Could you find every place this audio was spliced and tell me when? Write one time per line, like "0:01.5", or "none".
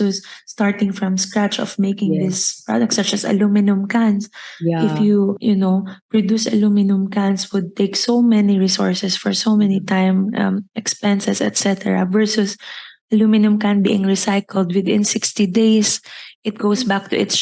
none